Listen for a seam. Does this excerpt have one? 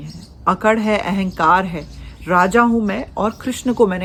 no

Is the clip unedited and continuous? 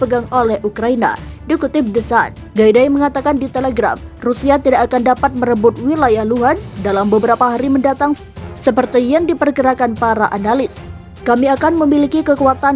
no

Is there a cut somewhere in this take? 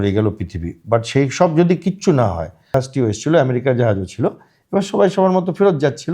yes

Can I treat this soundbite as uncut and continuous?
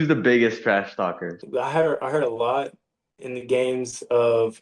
no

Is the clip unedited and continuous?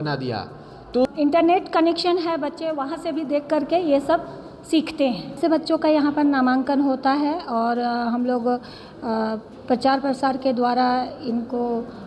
no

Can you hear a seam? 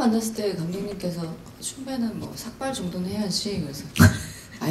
no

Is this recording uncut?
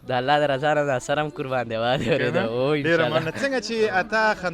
yes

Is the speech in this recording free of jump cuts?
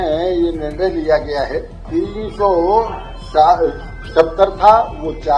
no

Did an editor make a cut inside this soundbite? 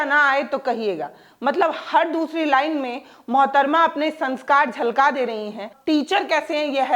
yes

